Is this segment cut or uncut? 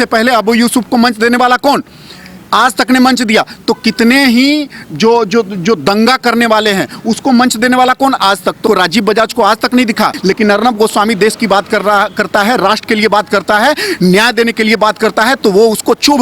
cut